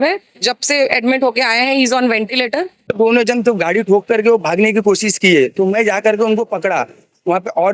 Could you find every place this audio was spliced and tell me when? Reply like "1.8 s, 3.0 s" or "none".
2.9 s